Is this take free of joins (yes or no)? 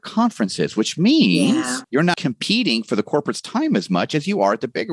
no